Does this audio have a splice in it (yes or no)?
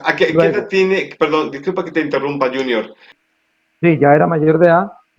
yes